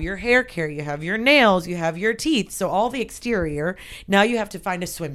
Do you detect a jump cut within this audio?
no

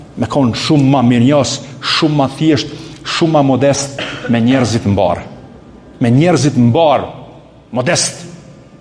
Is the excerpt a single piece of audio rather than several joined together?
yes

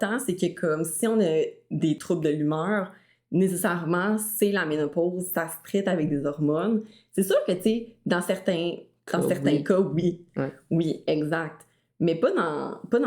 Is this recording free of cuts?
no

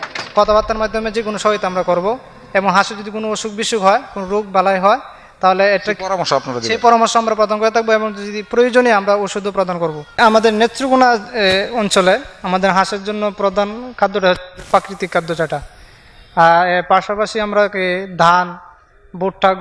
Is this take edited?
yes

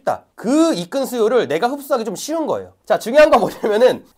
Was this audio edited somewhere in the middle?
yes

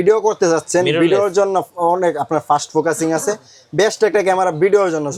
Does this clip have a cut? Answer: no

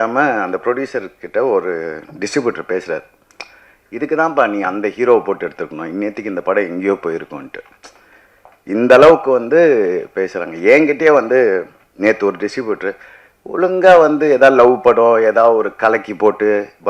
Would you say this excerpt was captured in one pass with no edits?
yes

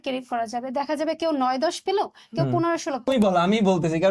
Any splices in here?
yes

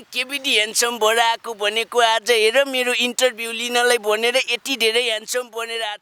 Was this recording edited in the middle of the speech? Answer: no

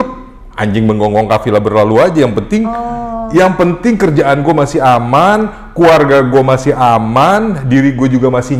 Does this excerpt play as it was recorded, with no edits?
yes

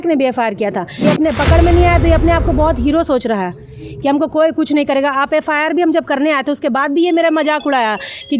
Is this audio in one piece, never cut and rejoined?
no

